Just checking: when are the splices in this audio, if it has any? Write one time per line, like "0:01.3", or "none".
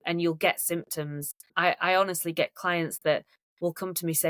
0:01.5